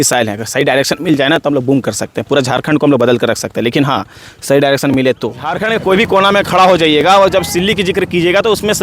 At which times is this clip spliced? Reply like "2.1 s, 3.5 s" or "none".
5.5 s